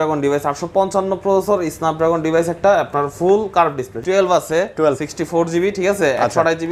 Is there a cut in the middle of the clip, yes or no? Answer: yes